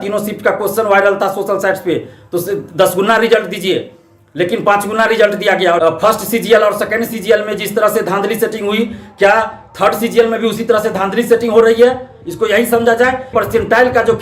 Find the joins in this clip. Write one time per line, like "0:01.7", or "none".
0:05.8
0:13.3